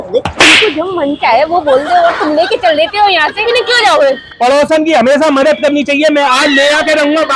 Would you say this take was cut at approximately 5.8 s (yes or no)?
no